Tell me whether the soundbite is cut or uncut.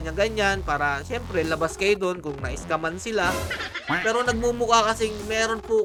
uncut